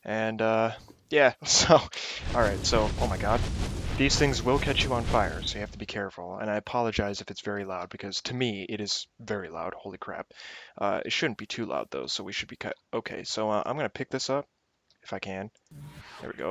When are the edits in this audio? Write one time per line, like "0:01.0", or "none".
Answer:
0:14.8